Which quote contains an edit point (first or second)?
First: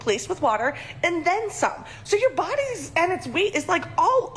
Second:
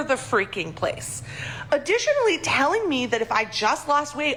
first